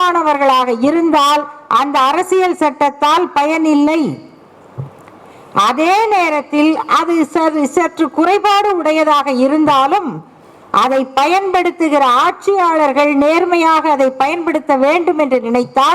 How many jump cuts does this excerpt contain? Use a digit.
0